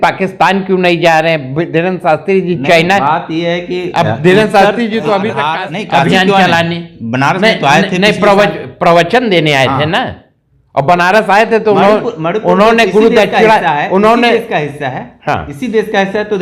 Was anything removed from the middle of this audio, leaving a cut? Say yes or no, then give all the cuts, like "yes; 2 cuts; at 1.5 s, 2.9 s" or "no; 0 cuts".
yes; 1 cut; at 5.4 s